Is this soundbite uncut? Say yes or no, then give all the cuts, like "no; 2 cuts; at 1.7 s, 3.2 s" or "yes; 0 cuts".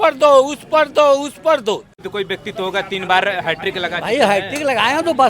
no; 1 cut; at 2.0 s